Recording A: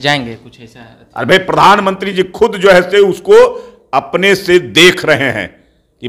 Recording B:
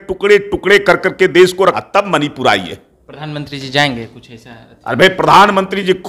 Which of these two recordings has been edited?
B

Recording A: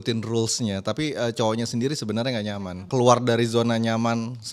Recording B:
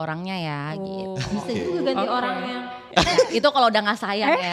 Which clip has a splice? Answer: A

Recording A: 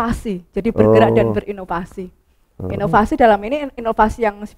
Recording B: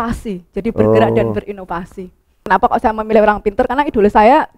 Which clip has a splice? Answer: B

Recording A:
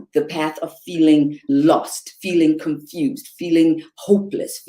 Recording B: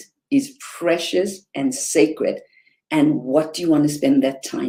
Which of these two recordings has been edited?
A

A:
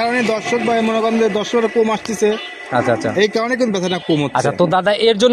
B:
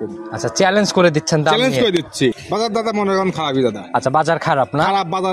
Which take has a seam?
B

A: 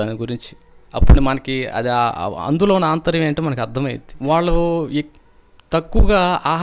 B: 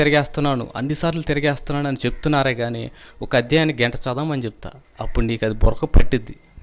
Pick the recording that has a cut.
A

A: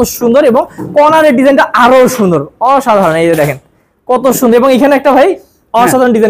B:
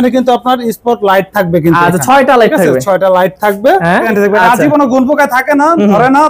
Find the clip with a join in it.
B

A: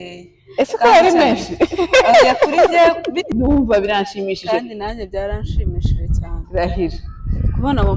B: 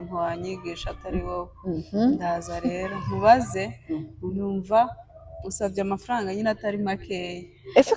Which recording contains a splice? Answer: A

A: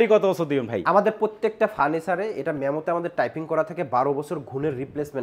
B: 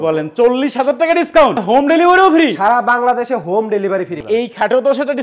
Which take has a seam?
B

